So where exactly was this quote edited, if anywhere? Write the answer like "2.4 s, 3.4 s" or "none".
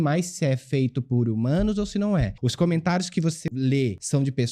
2.4 s, 3.6 s